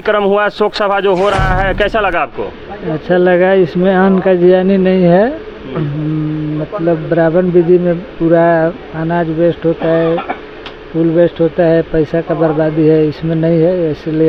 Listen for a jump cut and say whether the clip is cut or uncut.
uncut